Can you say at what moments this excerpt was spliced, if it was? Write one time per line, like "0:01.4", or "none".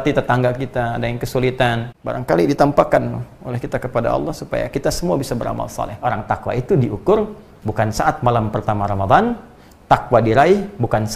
0:01.9
0:06.0